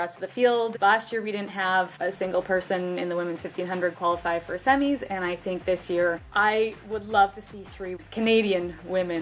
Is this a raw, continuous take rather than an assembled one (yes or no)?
no